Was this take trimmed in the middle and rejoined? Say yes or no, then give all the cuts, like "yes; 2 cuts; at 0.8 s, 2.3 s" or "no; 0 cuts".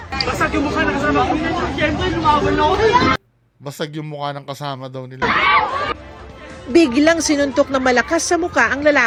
no; 0 cuts